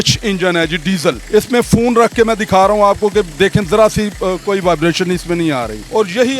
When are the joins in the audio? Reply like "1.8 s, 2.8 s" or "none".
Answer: 1.2 s